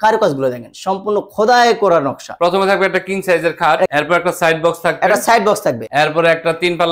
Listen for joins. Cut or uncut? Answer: cut